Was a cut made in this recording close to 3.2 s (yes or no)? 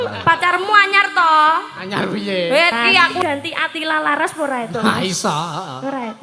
yes